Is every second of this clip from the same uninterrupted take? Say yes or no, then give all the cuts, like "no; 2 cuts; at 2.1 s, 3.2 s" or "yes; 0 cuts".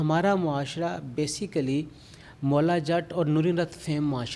yes; 0 cuts